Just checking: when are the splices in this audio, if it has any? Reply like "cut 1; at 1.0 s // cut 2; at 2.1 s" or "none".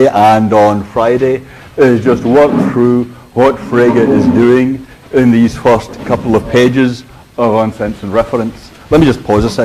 none